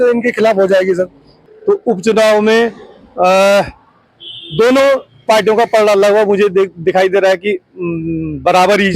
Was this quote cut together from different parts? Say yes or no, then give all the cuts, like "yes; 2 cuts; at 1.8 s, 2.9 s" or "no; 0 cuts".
yes; 1 cut; at 1.4 s